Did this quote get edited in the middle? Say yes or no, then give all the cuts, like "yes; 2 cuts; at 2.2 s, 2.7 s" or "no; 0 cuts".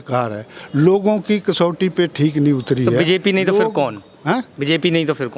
no; 0 cuts